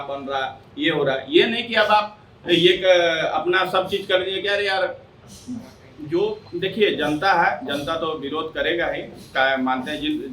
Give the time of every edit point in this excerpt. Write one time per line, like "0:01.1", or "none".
0:06.4